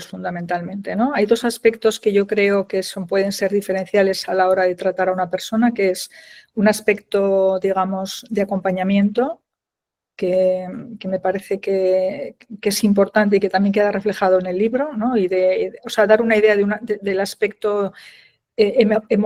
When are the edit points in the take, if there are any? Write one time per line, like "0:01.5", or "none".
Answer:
none